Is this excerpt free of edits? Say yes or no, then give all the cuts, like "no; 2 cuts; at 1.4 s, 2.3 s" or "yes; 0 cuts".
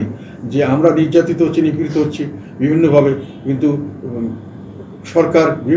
yes; 0 cuts